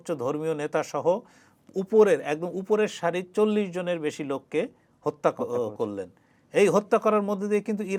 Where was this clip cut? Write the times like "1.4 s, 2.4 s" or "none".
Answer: none